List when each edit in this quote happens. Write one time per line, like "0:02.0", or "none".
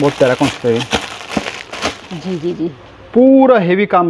0:02.1

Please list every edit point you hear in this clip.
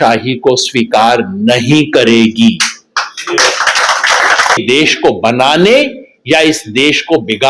0:04.6

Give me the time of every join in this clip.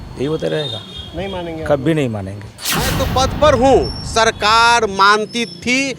0:03.0

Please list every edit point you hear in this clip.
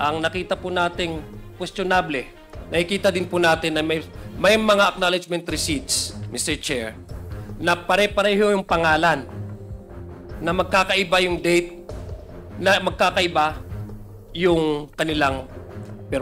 none

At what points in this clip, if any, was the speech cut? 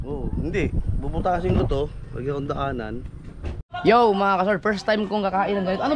0:03.7

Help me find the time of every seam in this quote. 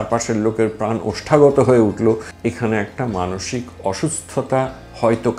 0:02.3

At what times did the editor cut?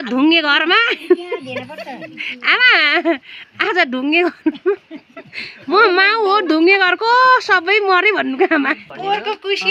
0:08.8

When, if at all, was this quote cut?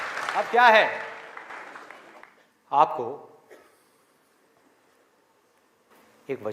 0:01.5

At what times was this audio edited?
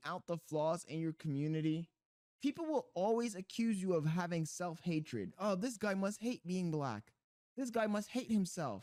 none

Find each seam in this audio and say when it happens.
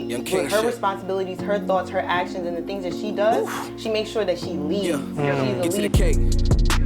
0:05.9

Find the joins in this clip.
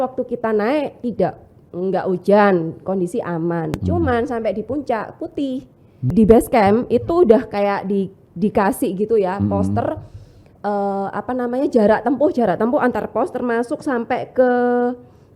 0:06.1

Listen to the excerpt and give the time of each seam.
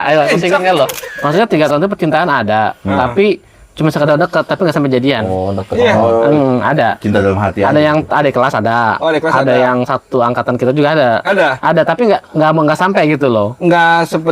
0:01.1

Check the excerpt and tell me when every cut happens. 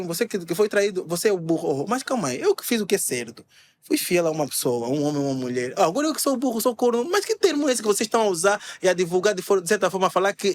none

